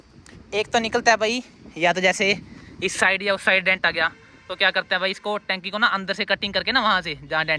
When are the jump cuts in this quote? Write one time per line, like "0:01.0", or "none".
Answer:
none